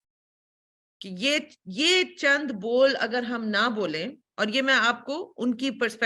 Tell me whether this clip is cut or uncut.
uncut